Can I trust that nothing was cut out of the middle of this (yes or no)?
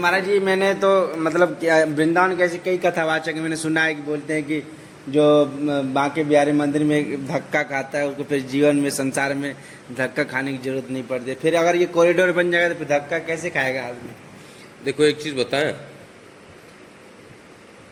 yes